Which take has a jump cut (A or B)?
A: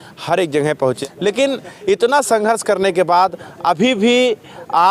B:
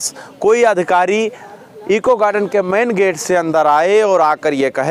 A